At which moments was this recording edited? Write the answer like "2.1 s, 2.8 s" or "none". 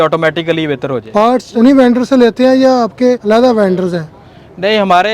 1.2 s, 3.2 s